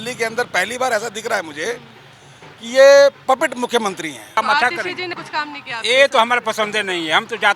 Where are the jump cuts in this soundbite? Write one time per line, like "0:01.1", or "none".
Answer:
0:04.4
0:05.2